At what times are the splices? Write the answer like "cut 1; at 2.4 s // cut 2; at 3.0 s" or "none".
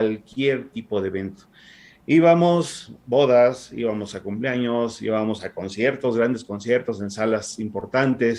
none